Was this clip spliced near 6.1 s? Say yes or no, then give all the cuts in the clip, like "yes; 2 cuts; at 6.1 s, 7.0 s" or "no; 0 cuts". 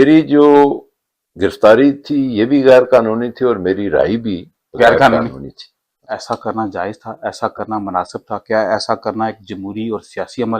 yes; 1 cut; at 6.1 s